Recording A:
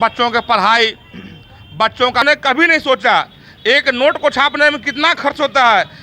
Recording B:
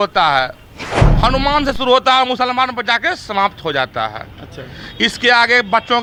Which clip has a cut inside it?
A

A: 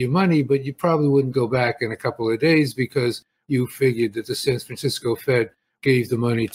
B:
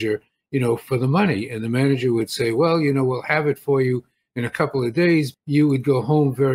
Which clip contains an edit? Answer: B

